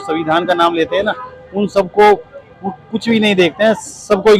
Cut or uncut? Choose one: uncut